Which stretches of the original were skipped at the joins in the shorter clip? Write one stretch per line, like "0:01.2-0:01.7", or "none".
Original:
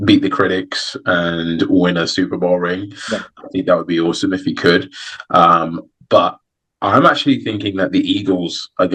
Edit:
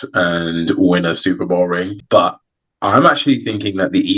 0:02.9-0:06.0